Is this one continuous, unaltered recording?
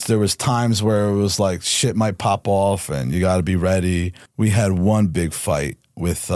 no; 1 cut; at 4.2 s

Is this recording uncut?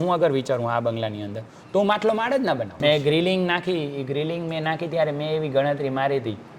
no; 1 cut; at 2.7 s

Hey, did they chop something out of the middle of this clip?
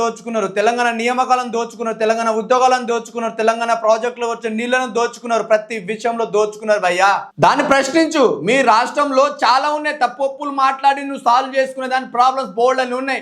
yes; 1 cut; at 7.3 s

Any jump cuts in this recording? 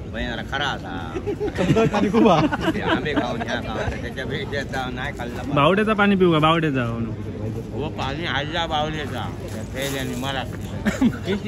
no; 0 cuts

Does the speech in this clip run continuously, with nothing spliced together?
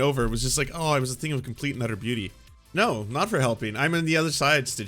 no; 1 cut; at 2.6 s

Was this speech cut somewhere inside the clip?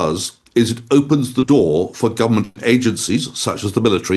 no; 0 cuts

